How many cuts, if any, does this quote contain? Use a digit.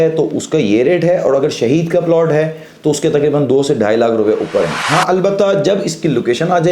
1